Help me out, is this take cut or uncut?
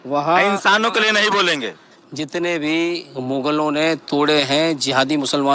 cut